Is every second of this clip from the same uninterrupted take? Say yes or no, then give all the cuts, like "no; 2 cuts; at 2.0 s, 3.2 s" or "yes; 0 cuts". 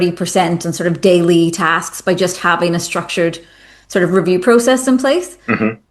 yes; 0 cuts